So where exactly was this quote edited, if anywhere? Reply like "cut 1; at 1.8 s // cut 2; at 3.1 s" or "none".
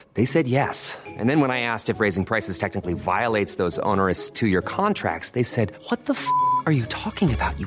none